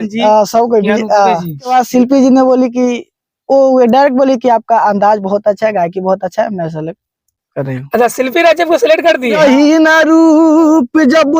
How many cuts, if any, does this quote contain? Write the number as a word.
two